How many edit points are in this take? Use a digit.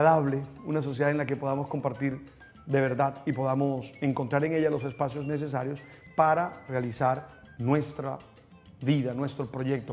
1